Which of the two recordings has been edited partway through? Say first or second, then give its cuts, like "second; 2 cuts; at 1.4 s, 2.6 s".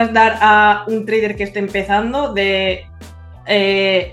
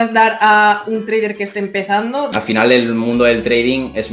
second; 1 cut; at 2.3 s